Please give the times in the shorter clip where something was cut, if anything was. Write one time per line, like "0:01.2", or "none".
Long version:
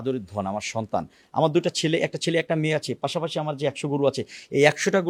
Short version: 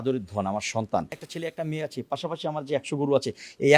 0:01.2